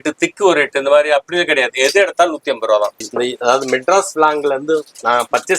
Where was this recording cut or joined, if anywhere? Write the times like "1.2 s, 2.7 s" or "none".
3.0 s